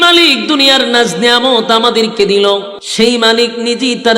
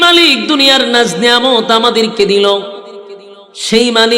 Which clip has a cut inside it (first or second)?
first